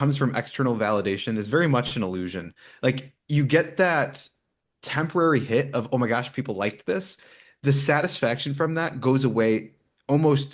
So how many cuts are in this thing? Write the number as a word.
zero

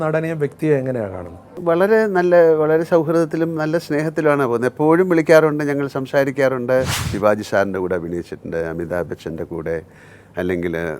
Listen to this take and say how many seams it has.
two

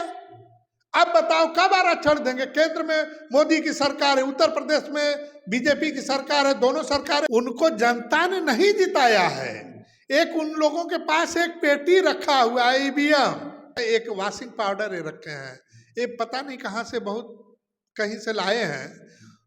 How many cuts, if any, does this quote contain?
two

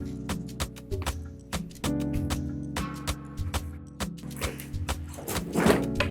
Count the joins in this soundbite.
one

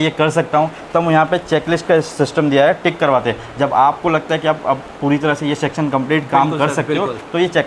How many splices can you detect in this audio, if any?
zero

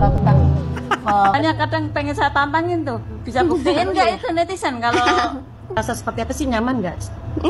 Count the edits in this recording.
one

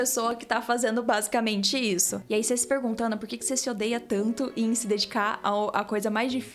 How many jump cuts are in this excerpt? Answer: one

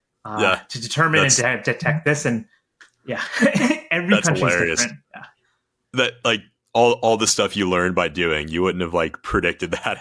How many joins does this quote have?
zero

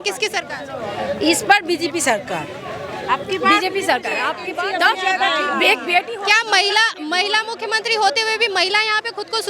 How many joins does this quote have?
one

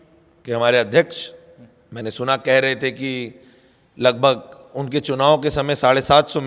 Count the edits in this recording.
zero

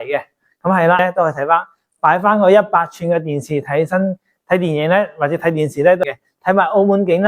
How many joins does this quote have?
two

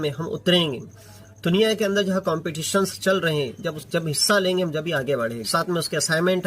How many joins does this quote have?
one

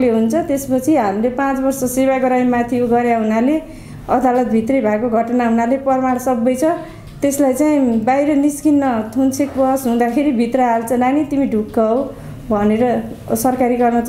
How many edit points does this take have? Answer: zero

